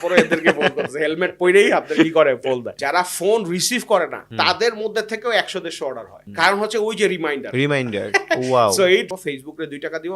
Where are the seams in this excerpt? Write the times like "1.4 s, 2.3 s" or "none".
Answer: 2.7 s, 4.2 s, 9.1 s